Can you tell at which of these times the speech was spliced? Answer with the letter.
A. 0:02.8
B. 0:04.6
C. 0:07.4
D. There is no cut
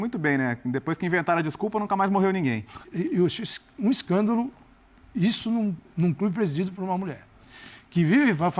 A